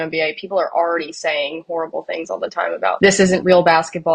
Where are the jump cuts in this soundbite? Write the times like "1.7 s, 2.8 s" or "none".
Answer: 3.0 s